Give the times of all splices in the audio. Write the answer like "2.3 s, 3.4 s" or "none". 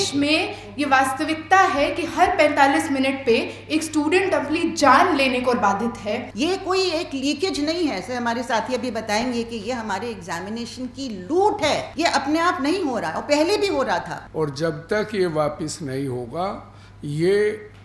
6.3 s, 11.9 s, 14.2 s

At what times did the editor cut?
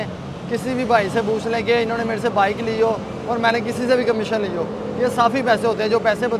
none

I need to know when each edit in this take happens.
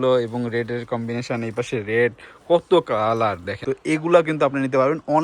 3.5 s

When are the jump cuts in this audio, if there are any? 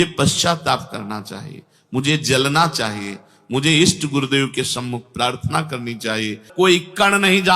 6.4 s

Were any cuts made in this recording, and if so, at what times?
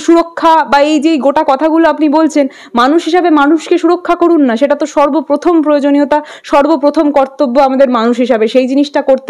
none

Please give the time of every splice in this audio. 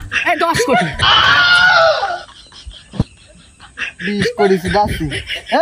1.0 s

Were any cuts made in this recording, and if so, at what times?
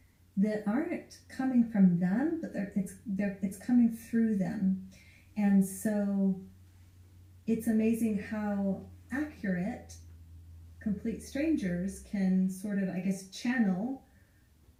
none

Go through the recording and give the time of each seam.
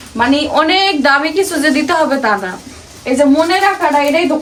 none

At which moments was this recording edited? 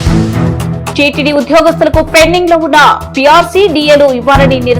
0.9 s

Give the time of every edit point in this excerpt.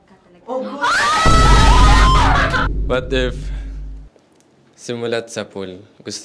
2.8 s

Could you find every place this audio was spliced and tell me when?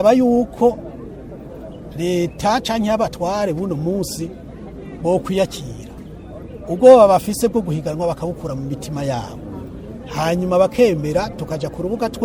none

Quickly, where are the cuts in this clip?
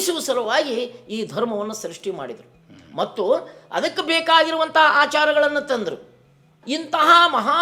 6.6 s

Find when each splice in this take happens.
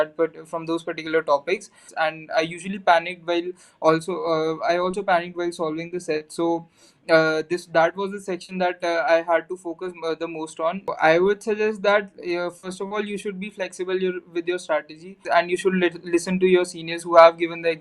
1.9 s, 10.9 s, 15.1 s

